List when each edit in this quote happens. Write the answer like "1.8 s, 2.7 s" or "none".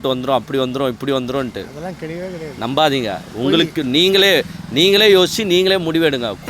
none